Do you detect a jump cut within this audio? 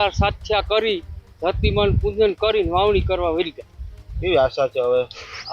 no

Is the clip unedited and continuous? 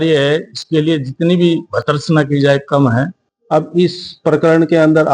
no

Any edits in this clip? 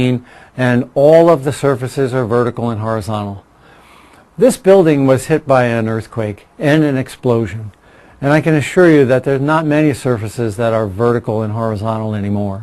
yes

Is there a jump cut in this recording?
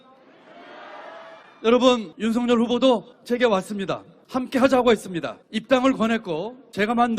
yes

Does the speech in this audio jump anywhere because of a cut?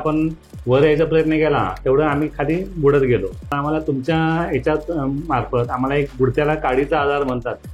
yes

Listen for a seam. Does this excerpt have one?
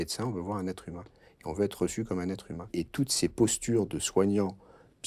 yes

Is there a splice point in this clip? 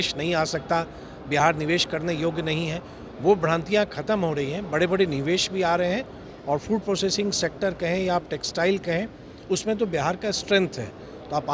no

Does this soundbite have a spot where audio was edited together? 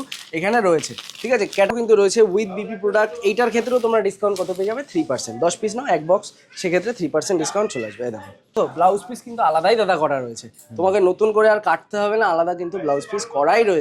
yes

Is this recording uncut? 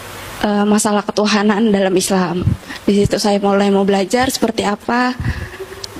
yes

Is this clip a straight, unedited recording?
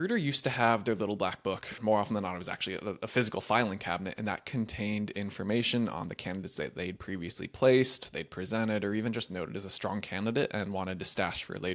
no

